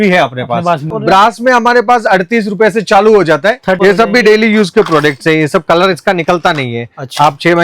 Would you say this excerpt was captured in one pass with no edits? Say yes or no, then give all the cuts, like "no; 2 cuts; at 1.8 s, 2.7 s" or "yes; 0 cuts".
no; 2 cuts; at 1.0 s, 3.8 s